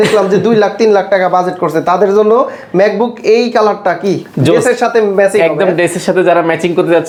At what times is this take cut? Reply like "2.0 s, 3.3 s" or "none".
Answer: none